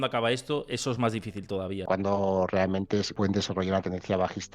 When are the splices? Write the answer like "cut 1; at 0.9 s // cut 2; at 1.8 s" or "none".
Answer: cut 1; at 1.8 s // cut 2; at 3.1 s